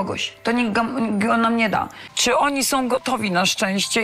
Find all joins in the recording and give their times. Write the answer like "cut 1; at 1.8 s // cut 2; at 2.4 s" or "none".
cut 1; at 2.1 s

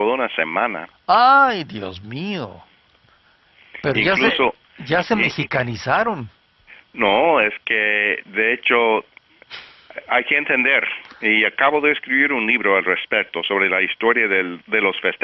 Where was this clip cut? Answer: none

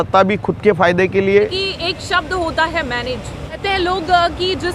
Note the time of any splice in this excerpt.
cut 1; at 1.3 s // cut 2; at 3.6 s

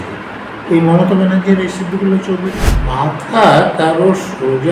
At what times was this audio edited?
cut 1; at 2.7 s

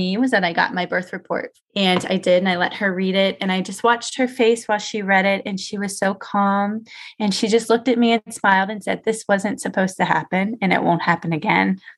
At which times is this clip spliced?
cut 1; at 1.5 s

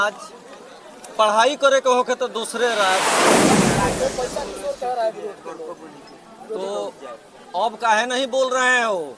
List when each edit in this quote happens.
cut 1; at 3.0 s // cut 2; at 3.9 s

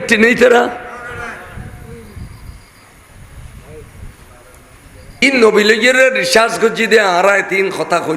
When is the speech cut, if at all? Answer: cut 1; at 5.2 s

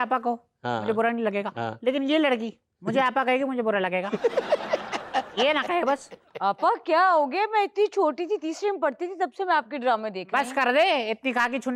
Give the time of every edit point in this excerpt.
none

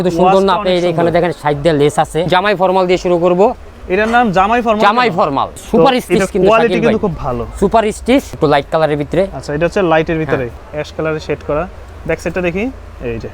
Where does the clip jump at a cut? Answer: cut 1; at 2.3 s // cut 2; at 5.6 s // cut 3; at 8.3 s // cut 4; at 10.6 s

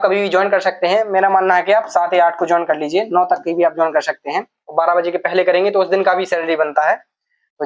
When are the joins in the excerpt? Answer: none

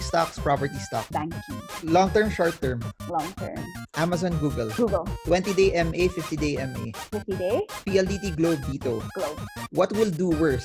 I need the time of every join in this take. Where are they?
none

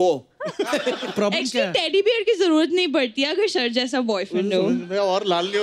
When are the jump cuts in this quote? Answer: cut 1; at 1.0 s

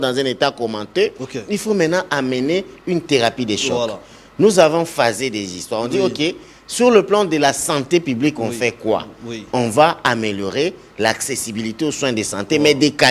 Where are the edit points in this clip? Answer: none

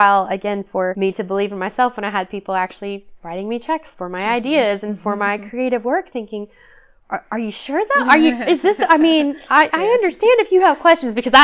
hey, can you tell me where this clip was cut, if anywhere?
cut 1; at 0.9 s

